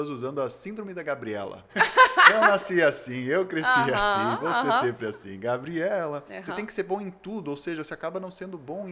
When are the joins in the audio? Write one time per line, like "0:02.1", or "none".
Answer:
0:01.6
0:06.4

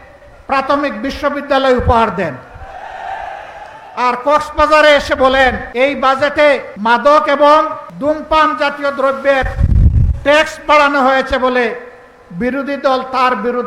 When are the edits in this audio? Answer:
0:05.6
0:06.7
0:07.8

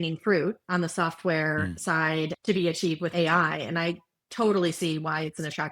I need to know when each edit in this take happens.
0:02.4
0:03.1

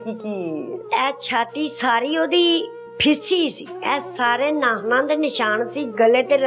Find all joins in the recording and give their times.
0:02.8
0:03.7

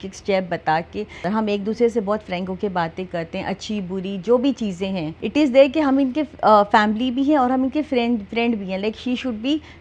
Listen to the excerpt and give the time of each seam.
0:01.2
0:05.2

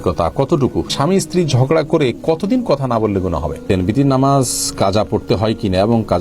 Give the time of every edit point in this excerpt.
0:00.9
0:03.6

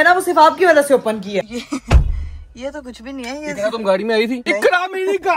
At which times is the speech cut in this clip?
0:01.5
0:04.4

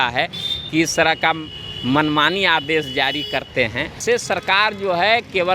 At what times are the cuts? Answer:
0:04.0

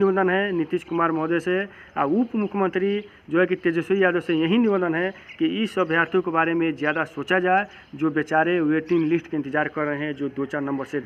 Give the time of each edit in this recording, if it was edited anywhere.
none

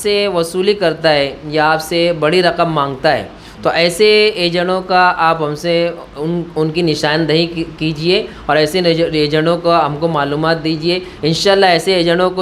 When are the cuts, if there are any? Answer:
none

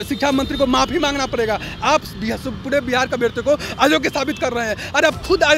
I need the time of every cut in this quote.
none

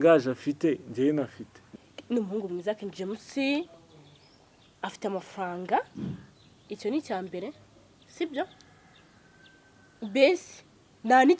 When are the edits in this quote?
0:01.6

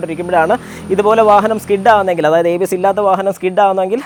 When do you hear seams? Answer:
none

